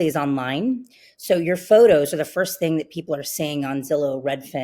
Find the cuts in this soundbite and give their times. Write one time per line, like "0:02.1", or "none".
none

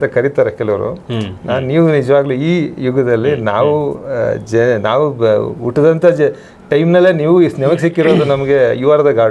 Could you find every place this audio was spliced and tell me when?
none

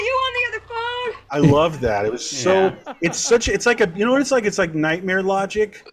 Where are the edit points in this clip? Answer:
0:01.3

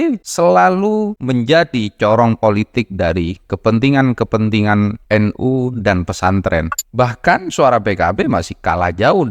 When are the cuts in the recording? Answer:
0:01.2
0:06.7

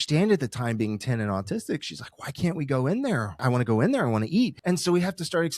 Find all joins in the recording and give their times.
0:03.4
0:04.6

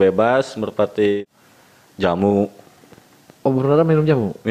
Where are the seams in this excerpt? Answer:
0:01.2

